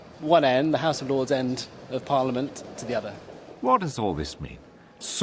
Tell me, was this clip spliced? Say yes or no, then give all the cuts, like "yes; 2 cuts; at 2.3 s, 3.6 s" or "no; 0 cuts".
yes; 1 cut; at 3.2 s